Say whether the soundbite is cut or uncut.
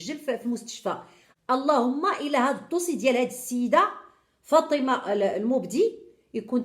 cut